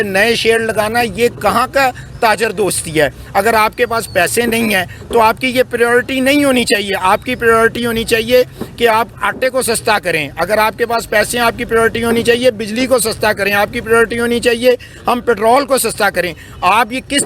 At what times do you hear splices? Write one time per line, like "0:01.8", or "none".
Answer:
none